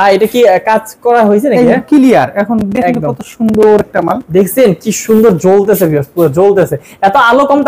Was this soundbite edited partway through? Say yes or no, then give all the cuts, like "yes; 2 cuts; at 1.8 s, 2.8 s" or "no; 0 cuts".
no; 0 cuts